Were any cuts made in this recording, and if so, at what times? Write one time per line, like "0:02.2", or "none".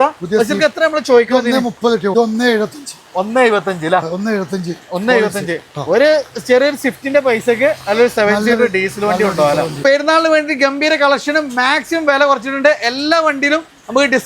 0:02.1
0:09.8